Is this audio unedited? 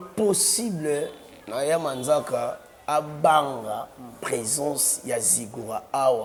yes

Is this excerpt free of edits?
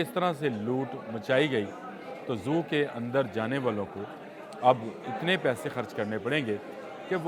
yes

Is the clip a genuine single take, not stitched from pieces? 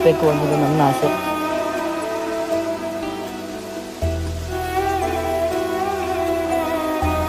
yes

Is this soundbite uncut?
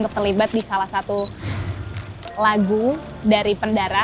yes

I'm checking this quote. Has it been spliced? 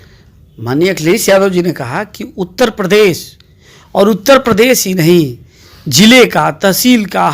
no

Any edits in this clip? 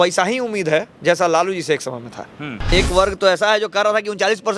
yes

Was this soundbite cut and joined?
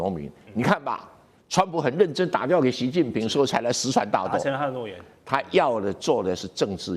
no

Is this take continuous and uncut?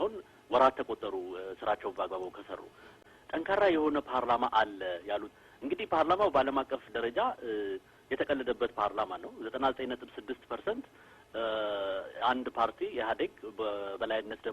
no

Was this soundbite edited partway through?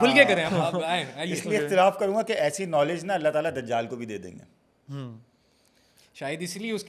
no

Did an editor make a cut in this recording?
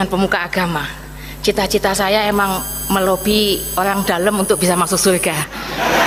no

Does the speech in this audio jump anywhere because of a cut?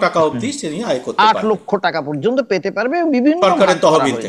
no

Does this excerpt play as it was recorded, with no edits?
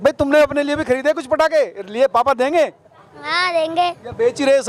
yes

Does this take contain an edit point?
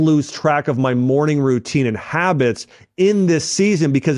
no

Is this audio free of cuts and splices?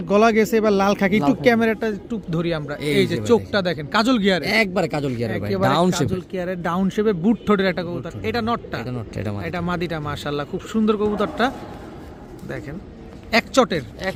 yes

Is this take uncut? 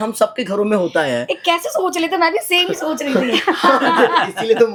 yes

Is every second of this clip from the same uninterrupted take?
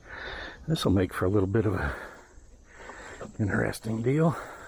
yes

